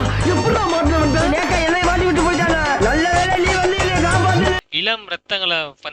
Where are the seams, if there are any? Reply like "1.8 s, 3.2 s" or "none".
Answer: 4.6 s